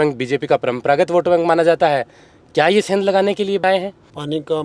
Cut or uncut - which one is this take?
cut